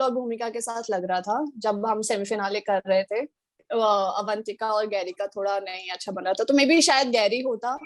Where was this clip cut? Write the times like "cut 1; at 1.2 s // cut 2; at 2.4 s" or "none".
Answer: cut 1; at 3.6 s

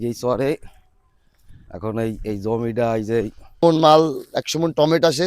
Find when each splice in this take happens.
cut 1; at 3.6 s

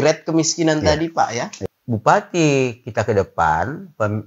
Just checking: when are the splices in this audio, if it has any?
cut 1; at 1.6 s

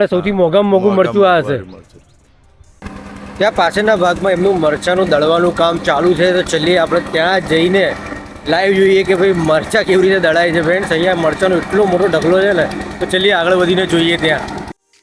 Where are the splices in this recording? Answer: none

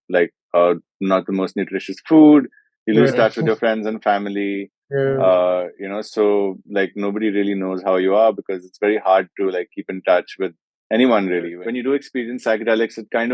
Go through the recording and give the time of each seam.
cut 1; at 11.6 s

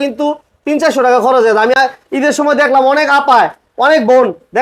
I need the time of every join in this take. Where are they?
none

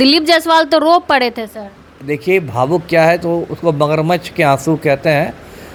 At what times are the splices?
none

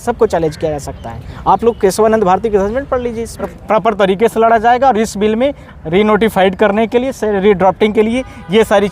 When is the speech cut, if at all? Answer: cut 1; at 3.5 s

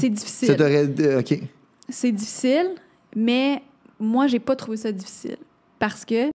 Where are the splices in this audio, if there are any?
none

